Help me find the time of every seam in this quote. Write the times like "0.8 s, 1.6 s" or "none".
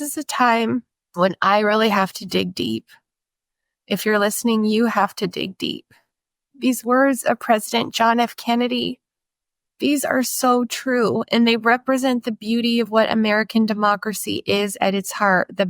1.0 s

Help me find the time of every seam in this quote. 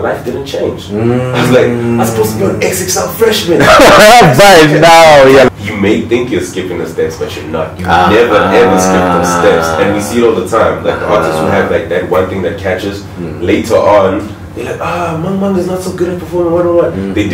5.5 s

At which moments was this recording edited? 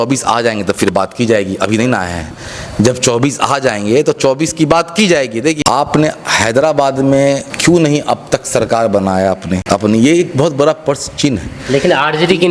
5.6 s, 7.5 s, 9.5 s

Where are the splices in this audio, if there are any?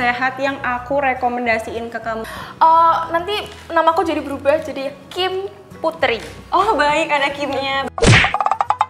2.4 s

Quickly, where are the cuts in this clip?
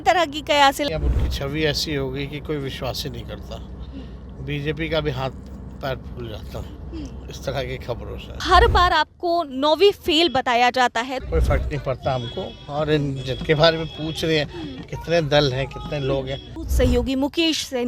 0.9 s, 8.4 s, 11.1 s, 16.6 s

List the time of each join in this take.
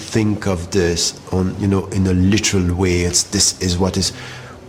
none

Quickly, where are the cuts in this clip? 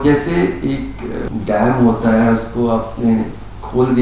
1.2 s

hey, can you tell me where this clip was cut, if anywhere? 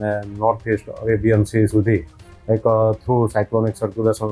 none

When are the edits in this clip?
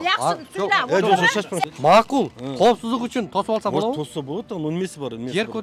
1.6 s

